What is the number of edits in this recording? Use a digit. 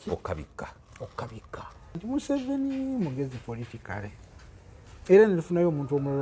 1